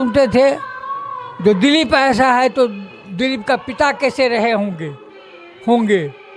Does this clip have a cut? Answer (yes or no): no